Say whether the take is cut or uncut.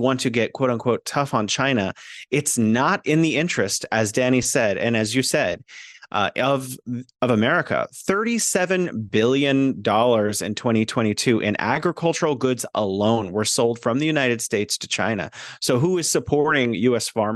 uncut